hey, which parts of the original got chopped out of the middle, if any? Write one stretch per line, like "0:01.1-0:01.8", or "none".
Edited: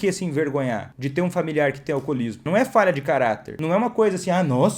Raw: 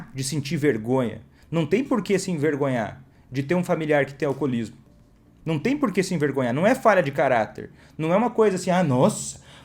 0:03.0-0:03.3
0:04.8-0:06.5
0:07.6-0:07.9